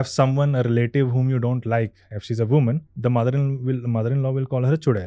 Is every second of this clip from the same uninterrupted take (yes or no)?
no